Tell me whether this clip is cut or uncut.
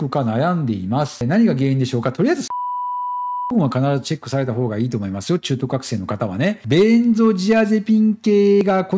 cut